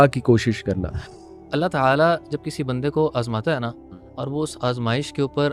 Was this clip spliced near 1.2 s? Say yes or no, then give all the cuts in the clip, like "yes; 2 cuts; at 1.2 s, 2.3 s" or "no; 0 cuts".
yes; 1 cut; at 1.2 s